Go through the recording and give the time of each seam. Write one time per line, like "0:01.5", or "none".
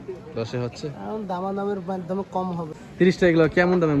0:02.7

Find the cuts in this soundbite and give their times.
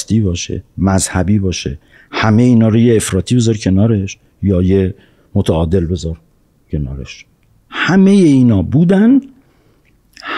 none

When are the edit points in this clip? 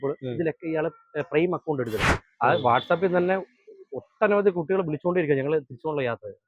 0:02.1

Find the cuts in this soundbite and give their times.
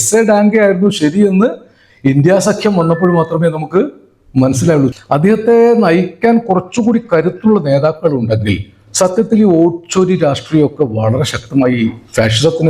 0:04.9

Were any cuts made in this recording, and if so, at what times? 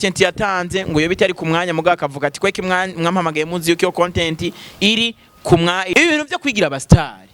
0:05.9

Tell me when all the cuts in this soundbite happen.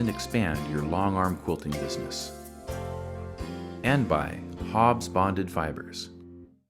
0:05.8

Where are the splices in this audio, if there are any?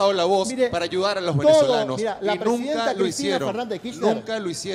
none

